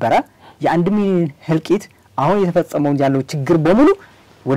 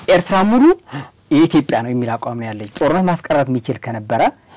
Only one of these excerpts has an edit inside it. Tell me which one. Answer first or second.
second